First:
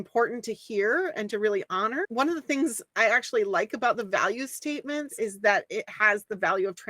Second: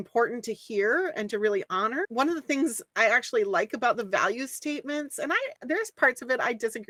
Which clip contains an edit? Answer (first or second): first